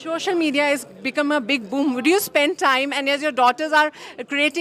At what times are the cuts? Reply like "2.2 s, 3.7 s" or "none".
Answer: none